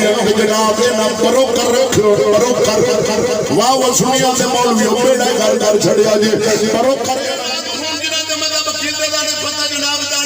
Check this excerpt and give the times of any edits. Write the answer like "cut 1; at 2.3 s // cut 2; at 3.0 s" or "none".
cut 1; at 7.4 s